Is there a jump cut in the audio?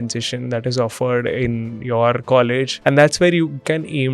yes; 1 cut; at 2.7 s

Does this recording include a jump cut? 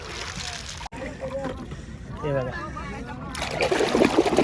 yes; 1 cut; at 0.9 s

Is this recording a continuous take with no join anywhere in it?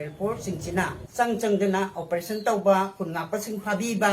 no; 1 cut; at 1.0 s

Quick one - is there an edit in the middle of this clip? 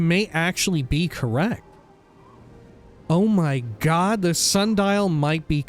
yes; 2 cuts; at 1.6 s, 3.1 s

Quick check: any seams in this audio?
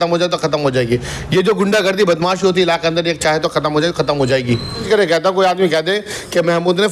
yes; 1 cut; at 4.8 s

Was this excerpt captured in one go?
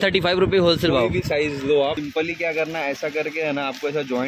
no; 1 cut; at 2.0 s

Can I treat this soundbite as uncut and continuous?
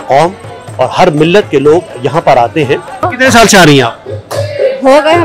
no; 1 cut; at 3.0 s

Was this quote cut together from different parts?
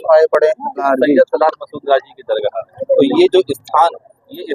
yes; 2 cuts; at 0.8 s, 2.7 s

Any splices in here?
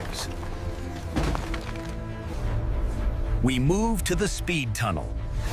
yes; 1 cut; at 2.3 s

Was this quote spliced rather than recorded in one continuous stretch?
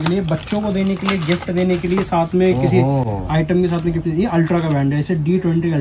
no; 0 cuts

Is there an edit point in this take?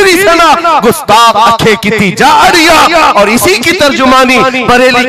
no; 0 cuts

